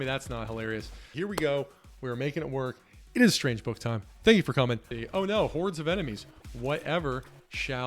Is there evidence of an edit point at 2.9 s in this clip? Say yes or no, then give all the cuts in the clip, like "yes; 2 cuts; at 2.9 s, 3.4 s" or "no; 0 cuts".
no; 2 cuts; at 1.1 s, 4.9 s